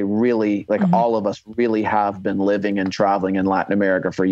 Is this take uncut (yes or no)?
yes